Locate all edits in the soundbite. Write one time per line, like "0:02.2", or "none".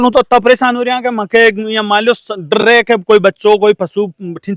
none